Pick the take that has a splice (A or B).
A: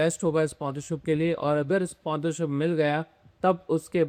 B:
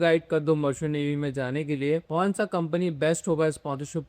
B